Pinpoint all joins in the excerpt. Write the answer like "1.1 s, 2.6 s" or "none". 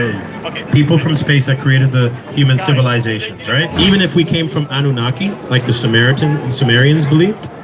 3.7 s